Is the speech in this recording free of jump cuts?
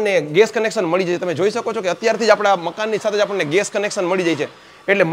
yes; 0 cuts

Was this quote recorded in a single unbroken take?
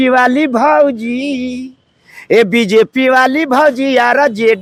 yes; 0 cuts

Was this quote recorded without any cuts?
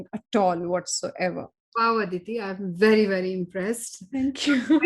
no; 1 cut; at 1.6 s

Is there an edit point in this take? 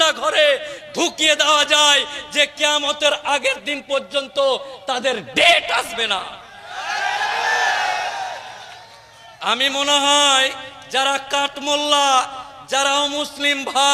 no; 0 cuts

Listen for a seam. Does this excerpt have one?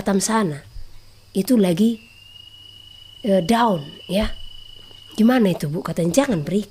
no; 0 cuts

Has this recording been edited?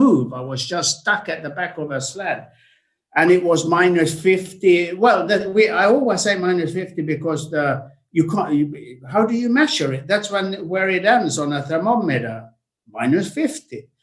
no; 0 cuts

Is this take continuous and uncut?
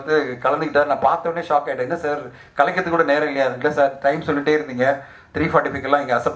yes; 0 cuts

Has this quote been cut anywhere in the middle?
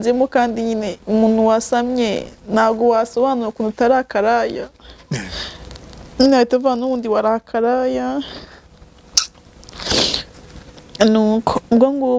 no; 0 cuts

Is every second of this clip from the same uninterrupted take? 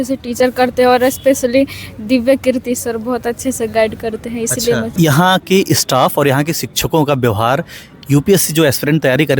no; 1 cut; at 4.9 s

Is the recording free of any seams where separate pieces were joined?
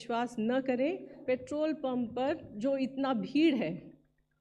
no; 2 cuts; at 1.2 s, 2.5 s

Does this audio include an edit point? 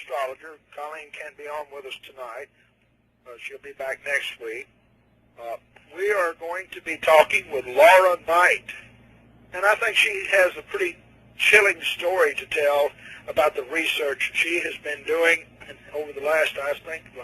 yes; 1 cut; at 8.3 s

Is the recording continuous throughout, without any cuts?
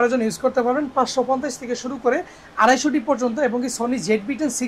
yes; 0 cuts

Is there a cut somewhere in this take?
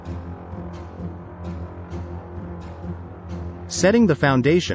yes; 1 cut; at 3.7 s

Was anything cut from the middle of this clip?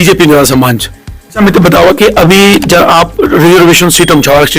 yes; 1 cut; at 1.4 s

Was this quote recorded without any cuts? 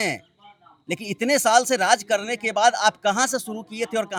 yes; 0 cuts

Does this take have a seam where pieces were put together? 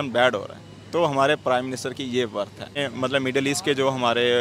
yes; 1 cut; at 2.8 s

